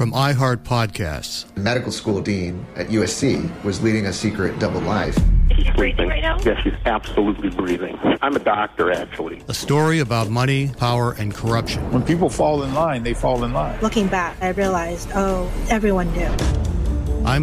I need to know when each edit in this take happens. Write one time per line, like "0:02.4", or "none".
none

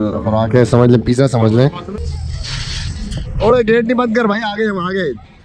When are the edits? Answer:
0:01.9

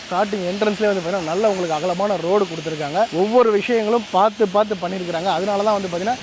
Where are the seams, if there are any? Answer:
none

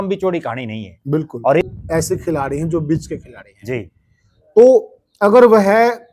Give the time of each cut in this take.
0:01.6

